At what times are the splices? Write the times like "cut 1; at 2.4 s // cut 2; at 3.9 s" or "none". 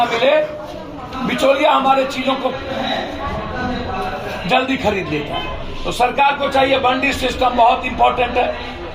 none